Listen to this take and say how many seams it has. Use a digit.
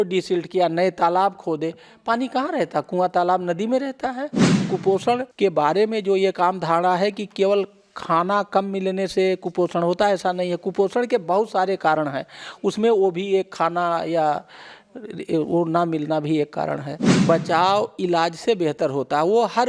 2